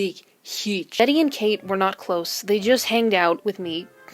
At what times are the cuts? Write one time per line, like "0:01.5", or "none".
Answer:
0:01.0